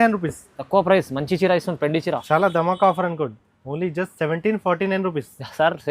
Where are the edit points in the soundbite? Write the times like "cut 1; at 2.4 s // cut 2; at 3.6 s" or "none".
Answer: cut 1; at 2.2 s